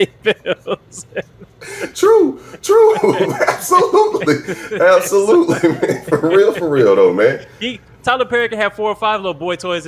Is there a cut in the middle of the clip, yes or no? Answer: no